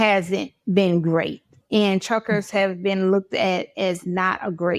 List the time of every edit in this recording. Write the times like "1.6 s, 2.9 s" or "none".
none